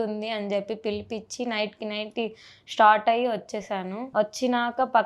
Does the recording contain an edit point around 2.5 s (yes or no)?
no